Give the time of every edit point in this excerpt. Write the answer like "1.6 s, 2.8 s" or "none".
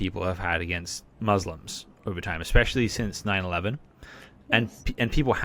none